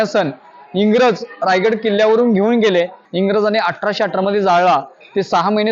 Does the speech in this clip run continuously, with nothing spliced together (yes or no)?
no